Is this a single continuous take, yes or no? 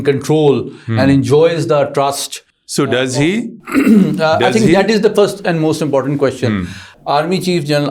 no